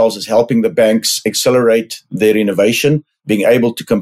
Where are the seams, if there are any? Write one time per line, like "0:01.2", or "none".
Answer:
0:03.1